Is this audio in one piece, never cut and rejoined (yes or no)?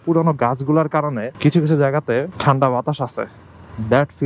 no